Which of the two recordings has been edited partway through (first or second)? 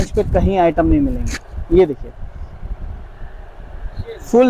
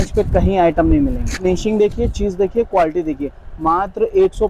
second